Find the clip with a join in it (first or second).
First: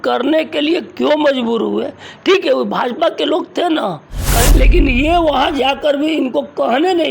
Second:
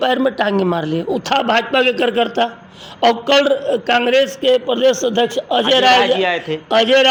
first